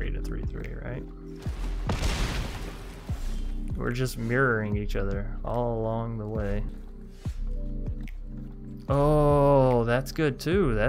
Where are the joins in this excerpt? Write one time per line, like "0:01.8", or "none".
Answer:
0:06.7